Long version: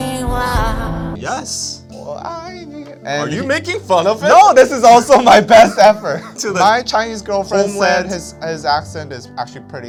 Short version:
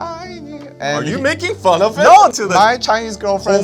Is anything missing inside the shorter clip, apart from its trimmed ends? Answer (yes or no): yes